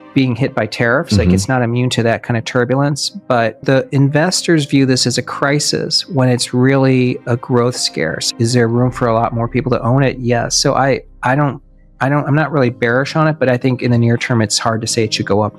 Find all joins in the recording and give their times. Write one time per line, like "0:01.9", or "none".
0:03.6
0:08.3